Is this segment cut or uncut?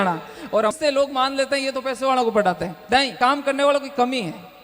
cut